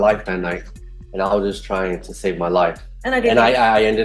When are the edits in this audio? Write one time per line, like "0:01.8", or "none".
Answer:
0:02.9

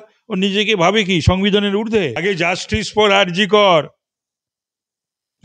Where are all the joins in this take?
0:02.2

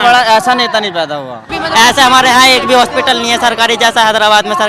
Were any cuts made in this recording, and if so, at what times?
0:01.5

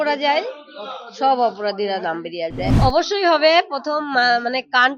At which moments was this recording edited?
0:02.7

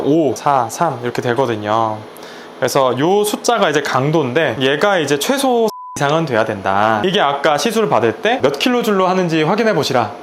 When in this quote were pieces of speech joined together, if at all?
0:05.9
0:07.0

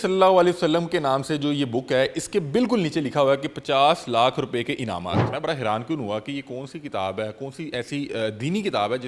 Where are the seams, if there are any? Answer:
0:05.2

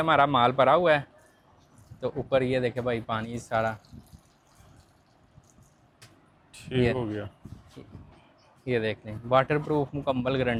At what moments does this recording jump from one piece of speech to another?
none

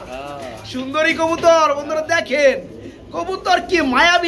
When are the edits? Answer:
none

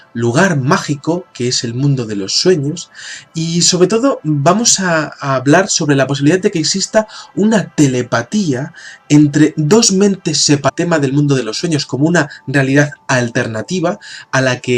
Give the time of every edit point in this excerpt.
none

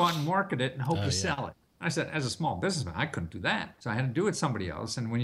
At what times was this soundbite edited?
0:01.6
0:03.7

